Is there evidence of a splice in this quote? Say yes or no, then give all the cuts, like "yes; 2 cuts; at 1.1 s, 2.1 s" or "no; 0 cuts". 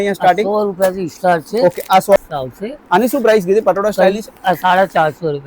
yes; 1 cut; at 2.2 s